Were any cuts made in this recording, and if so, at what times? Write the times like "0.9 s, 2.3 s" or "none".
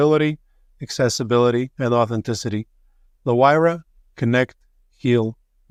none